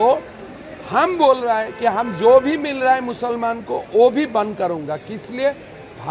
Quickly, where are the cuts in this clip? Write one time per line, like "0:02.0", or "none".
none